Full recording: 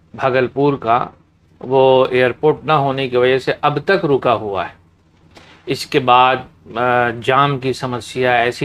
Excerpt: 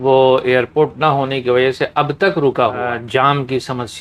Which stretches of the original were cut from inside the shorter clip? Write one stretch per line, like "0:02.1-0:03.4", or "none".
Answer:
0:04.5-0:07.0